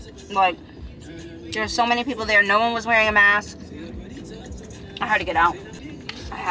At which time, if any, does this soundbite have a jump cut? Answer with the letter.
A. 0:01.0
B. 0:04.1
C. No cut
C